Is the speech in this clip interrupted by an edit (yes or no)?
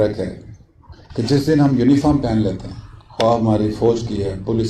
no